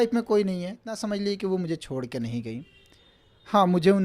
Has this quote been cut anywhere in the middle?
yes; 1 cut; at 0.9 s

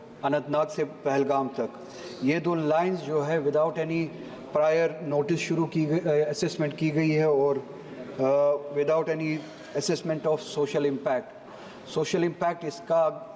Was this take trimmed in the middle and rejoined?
no; 0 cuts

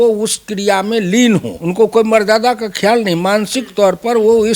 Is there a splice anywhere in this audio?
yes; 1 cut; at 1.5 s

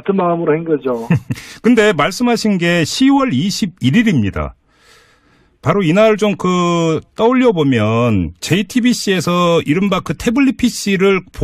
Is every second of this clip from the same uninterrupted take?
no; 1 cut; at 8.4 s

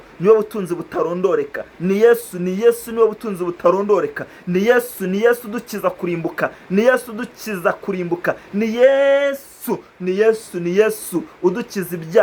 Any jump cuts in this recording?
no; 0 cuts

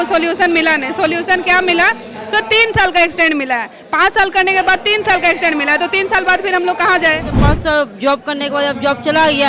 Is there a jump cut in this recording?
yes; 1 cut; at 7.4 s

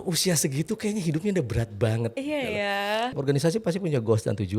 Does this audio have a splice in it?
yes; 1 cut; at 3.2 s

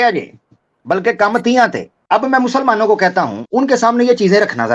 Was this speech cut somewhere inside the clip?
yes; 2 cuts; at 1.9 s, 3.4 s

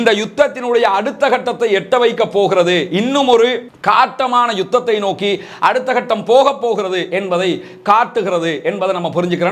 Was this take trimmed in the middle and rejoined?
no; 0 cuts

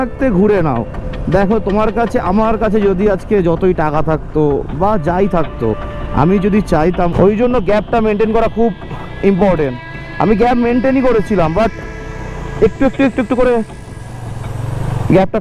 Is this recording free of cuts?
no; 1 cut; at 7.1 s

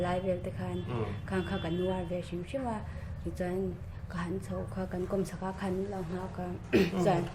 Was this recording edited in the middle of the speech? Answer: no; 0 cuts

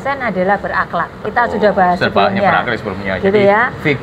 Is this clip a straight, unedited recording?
yes; 0 cuts

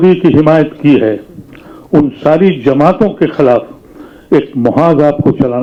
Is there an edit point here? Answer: no; 0 cuts

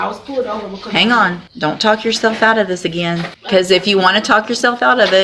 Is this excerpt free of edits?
no; 2 cuts; at 1.5 s, 3.3 s

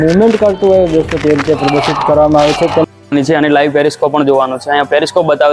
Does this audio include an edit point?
yes; 1 cut; at 2.8 s

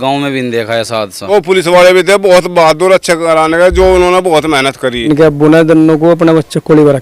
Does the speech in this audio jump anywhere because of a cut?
yes; 2 cuts; at 1.3 s, 5.0 s

